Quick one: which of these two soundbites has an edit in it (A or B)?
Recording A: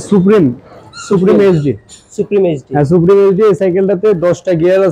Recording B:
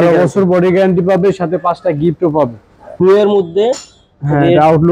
B